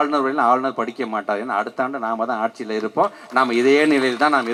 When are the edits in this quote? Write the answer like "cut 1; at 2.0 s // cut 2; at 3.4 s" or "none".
none